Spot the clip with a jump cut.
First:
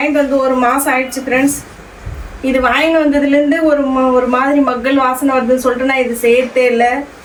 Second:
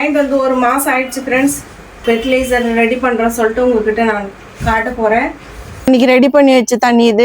second; 2 cuts; at 2.0 s, 5.9 s

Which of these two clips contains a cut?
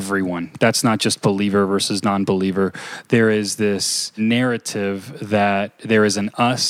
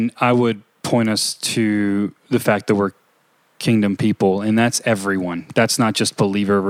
first; 2 cuts; at 4.2 s, 5.8 s

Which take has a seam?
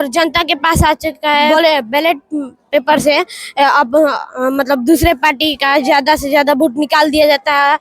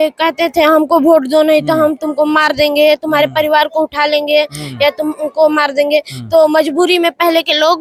first; 1 cut; at 1.5 s

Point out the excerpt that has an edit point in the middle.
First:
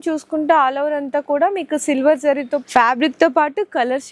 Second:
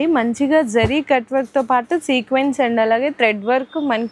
first; 1 cut; at 2.6 s

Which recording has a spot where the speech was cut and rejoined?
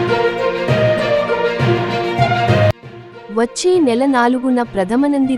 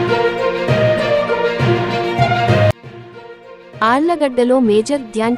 second; 1 cut; at 2.8 s

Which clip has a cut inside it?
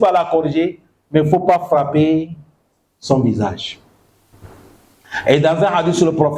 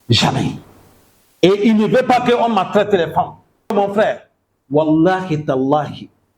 second; 1 cut; at 3.7 s

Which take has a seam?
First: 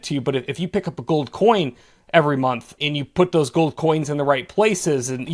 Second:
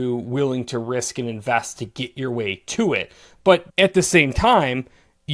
second; 1 cut; at 3.7 s

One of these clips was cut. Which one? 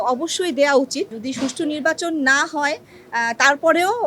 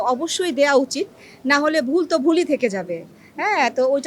first; 1 cut; at 1.2 s

